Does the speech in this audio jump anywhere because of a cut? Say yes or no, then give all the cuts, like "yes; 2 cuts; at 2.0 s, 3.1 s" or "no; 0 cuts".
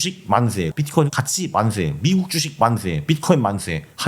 yes; 1 cut; at 0.9 s